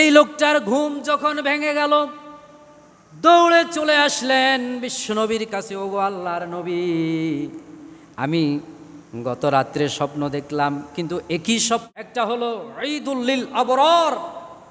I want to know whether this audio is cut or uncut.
cut